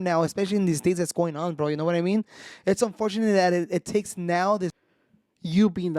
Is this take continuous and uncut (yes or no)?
no